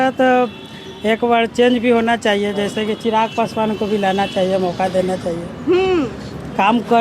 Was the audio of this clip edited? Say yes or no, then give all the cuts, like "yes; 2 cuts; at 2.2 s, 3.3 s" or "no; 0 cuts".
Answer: no; 0 cuts